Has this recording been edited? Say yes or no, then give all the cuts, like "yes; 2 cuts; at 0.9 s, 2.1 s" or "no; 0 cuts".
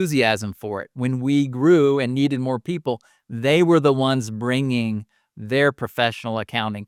no; 0 cuts